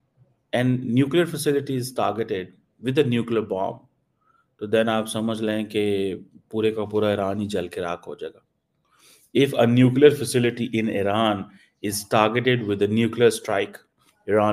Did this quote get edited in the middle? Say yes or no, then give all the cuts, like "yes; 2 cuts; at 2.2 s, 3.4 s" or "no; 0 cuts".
no; 0 cuts